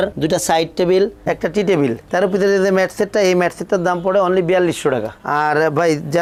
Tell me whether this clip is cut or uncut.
uncut